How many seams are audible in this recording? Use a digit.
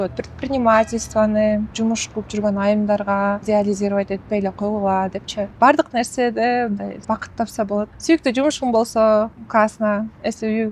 6